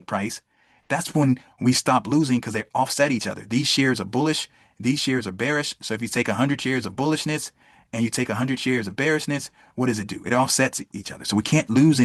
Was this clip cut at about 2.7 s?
no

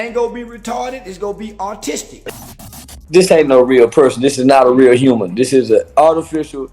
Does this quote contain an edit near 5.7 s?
no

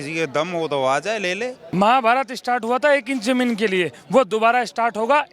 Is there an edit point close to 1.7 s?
yes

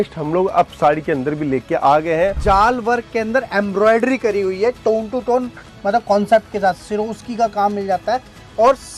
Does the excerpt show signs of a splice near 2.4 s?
yes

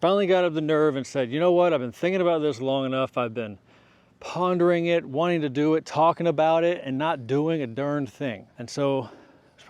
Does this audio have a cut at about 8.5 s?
yes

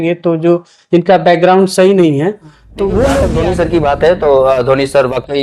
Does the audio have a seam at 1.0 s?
no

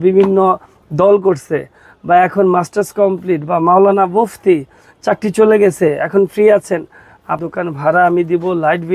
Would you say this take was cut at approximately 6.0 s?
no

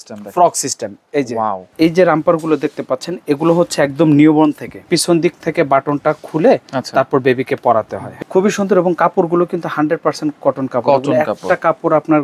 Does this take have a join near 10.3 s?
no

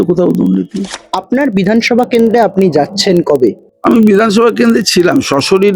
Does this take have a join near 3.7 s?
yes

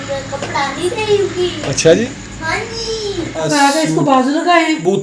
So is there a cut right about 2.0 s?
yes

